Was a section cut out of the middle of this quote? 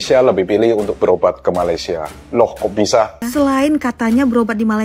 yes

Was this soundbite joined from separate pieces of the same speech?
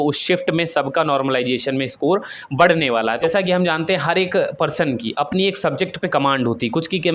yes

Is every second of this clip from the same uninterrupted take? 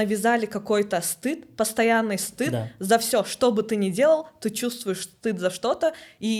yes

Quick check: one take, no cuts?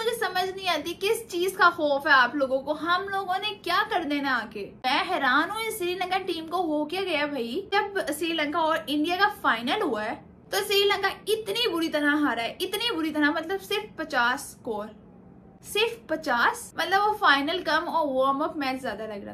no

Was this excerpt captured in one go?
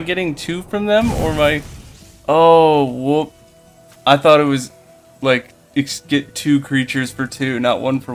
yes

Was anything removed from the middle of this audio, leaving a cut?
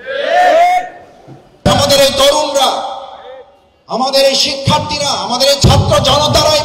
yes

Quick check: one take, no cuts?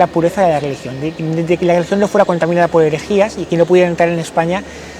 yes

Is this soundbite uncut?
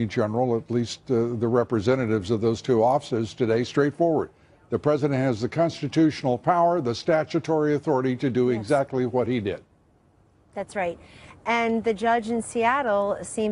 yes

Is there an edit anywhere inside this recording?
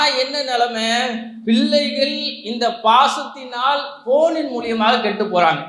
no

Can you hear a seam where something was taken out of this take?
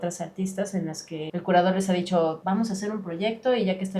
yes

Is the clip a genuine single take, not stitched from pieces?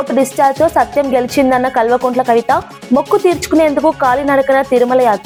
yes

